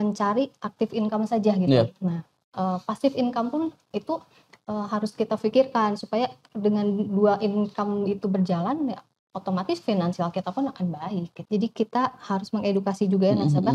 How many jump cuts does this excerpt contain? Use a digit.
1